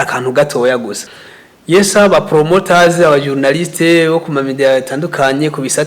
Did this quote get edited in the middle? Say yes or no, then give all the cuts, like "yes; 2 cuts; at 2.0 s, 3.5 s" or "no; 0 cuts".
yes; 1 cut; at 1.0 s